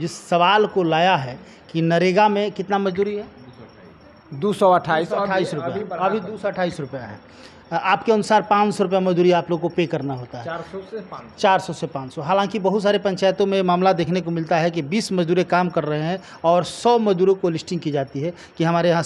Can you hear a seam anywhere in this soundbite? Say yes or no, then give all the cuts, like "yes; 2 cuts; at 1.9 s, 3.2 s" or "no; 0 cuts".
no; 0 cuts